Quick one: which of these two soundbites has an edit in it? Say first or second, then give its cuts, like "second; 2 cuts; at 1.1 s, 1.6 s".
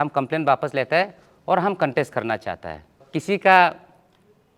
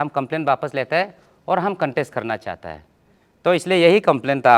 first; 1 cut; at 3.1 s